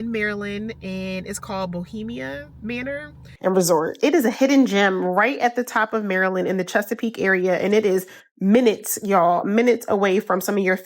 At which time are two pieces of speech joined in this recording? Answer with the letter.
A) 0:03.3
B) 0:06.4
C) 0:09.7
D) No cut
A